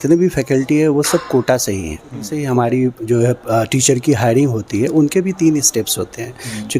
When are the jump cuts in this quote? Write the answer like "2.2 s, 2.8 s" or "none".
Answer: 2.3 s